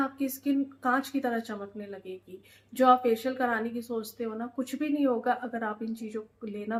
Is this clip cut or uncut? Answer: uncut